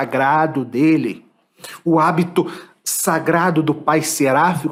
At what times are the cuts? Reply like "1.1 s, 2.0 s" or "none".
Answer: none